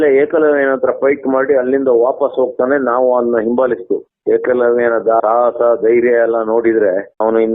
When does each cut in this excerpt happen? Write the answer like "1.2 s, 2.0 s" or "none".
4.1 s, 5.2 s